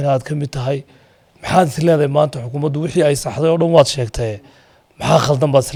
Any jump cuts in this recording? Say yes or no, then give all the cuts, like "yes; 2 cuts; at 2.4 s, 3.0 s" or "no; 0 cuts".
no; 0 cuts